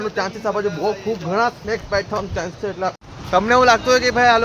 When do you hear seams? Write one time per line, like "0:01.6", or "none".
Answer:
0:03.0